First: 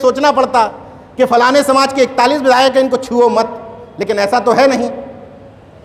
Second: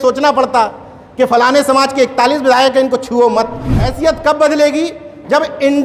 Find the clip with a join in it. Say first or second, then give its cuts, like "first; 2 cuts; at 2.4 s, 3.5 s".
second; 1 cut; at 3.8 s